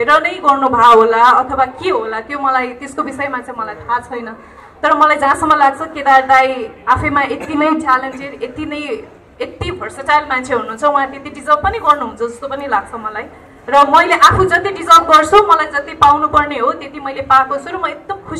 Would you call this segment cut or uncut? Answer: uncut